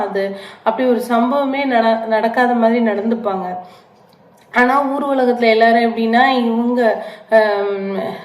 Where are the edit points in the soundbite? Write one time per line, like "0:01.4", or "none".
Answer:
none